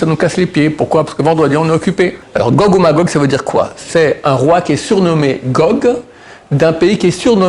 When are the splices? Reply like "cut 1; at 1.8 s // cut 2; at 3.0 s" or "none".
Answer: cut 1; at 2.2 s